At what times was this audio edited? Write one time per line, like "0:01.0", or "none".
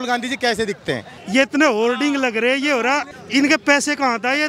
0:01.1
0:03.1